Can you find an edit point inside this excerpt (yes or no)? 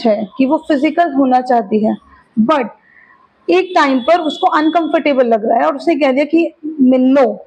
no